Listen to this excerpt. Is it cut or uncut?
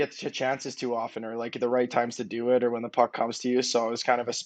uncut